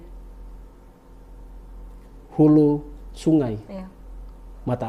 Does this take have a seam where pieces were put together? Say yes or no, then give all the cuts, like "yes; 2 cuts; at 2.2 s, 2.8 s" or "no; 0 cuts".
no; 0 cuts